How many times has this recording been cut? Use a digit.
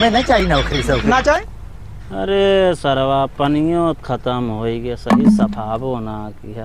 1